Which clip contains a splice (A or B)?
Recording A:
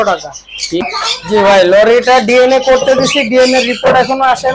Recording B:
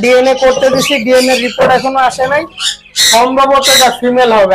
A